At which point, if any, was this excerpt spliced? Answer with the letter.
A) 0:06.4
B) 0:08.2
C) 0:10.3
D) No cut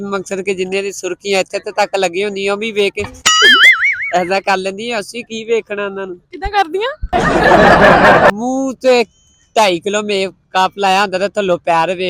D